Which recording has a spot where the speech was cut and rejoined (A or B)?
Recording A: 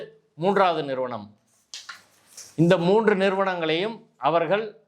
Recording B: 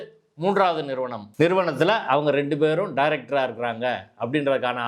B